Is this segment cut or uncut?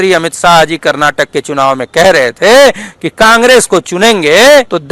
uncut